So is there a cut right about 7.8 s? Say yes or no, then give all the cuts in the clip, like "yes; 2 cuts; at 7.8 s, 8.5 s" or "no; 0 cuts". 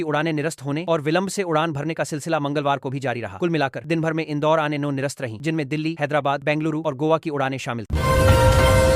yes; 1 cut; at 7.8 s